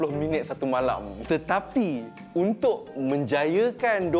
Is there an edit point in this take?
no; 0 cuts

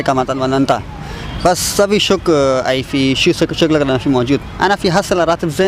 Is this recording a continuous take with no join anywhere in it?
yes; 0 cuts

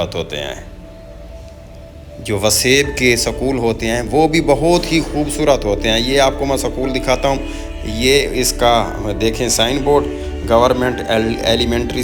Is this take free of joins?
yes; 0 cuts

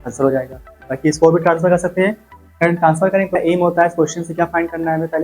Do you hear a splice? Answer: yes; 1 cut; at 3.4 s

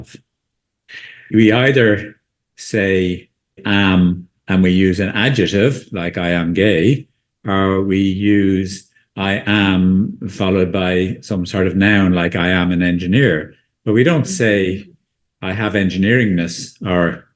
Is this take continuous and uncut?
no; 3 cuts; at 1.3 s, 2.5 s, 3.6 s

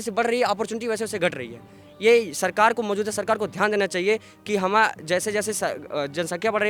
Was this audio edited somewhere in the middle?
no; 0 cuts

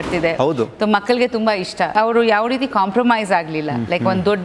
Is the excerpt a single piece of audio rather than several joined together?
no; 1 cut; at 1.9 s

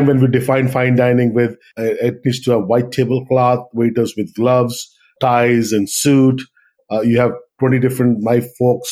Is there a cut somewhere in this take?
yes; 3 cuts; at 1.7 s, 5.1 s, 6.8 s

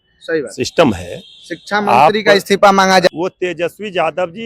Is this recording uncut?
no; 1 cut; at 3.1 s

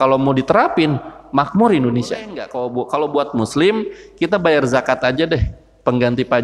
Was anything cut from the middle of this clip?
yes; 1 cut; at 2.5 s

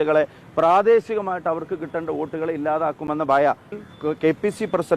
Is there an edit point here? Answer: yes; 1 cut; at 3.7 s

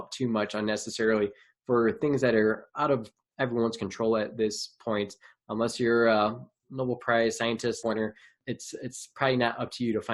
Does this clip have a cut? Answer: yes; 1 cut; at 7.8 s

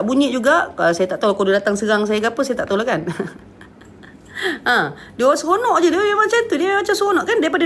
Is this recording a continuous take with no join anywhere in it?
yes; 0 cuts

